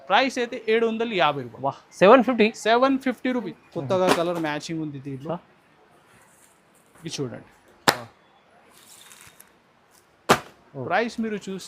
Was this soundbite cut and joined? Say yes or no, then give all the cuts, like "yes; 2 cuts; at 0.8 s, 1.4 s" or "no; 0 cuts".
yes; 1 cut; at 3.6 s